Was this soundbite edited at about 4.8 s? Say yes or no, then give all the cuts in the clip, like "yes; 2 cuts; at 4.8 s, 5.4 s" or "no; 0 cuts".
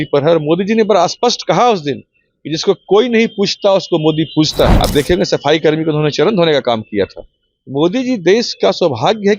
yes; 1 cut; at 4.8 s